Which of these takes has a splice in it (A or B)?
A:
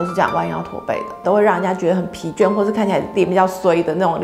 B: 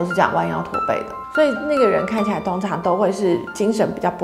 A